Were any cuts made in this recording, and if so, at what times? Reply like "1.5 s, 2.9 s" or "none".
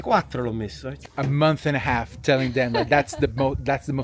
1.0 s